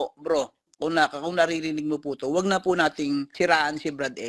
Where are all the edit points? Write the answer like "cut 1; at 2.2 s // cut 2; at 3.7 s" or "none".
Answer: cut 1; at 3.3 s